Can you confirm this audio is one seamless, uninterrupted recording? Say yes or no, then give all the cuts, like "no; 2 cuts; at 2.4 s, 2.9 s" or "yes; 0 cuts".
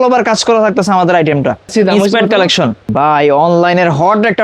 no; 2 cuts; at 1.7 s, 2.9 s